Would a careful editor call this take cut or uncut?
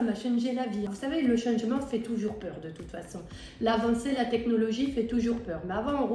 cut